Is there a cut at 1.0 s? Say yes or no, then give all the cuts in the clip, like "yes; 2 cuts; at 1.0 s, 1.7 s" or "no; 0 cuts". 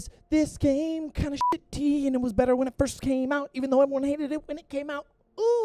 no; 0 cuts